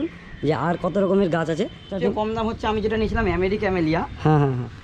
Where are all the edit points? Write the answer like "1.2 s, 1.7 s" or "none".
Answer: 1.8 s